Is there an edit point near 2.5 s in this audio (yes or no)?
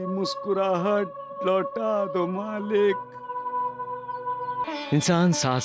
no